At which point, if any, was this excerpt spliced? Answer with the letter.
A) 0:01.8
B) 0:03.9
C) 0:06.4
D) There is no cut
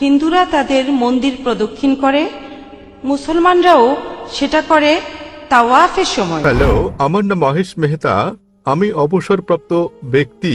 C